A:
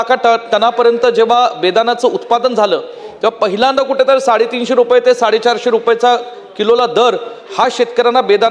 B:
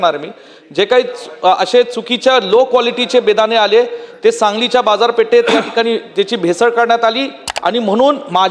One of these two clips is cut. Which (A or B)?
B